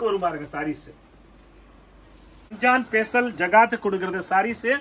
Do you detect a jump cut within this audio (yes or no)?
yes